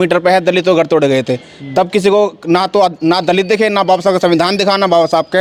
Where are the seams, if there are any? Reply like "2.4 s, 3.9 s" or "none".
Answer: none